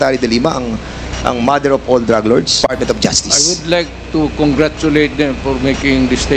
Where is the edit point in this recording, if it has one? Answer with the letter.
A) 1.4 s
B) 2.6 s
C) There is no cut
B